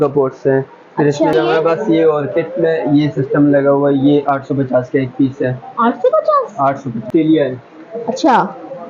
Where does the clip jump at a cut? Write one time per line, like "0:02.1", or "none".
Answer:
0:01.3
0:07.1